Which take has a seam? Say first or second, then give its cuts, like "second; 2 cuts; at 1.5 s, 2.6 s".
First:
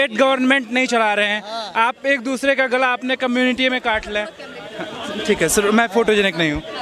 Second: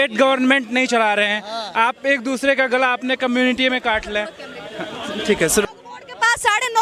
second; 1 cut; at 5.6 s